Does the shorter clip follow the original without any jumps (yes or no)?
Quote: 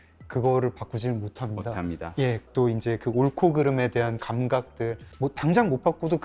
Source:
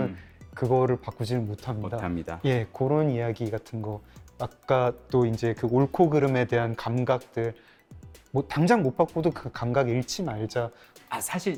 no